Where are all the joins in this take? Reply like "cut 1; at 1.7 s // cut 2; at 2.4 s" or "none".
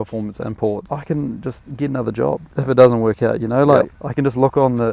cut 1; at 0.8 s // cut 2; at 1.6 s // cut 3; at 2.5 s // cut 4; at 4.0 s